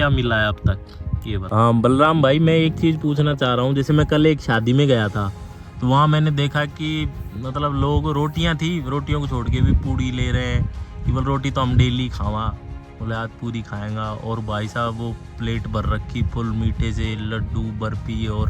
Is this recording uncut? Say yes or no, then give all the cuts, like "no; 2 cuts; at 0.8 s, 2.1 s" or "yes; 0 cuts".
no; 1 cut; at 1.4 s